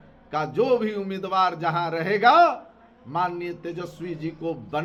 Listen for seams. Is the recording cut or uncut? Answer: uncut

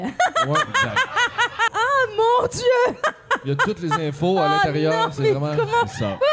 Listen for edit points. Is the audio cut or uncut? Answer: cut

